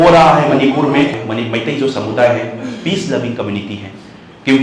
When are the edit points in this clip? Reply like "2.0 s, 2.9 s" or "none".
1.2 s